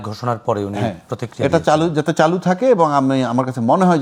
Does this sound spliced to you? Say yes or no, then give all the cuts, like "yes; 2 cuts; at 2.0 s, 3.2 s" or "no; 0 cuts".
no; 0 cuts